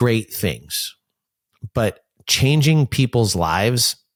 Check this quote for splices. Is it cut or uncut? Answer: uncut